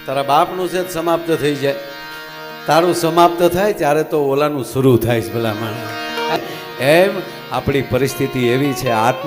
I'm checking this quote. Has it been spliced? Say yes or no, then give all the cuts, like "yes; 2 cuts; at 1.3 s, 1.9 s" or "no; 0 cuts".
yes; 1 cut; at 6.4 s